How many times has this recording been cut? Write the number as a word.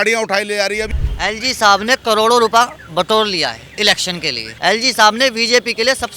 two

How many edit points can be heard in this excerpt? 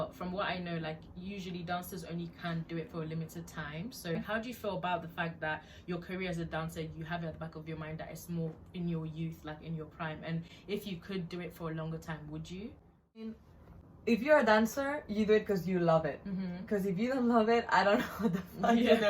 two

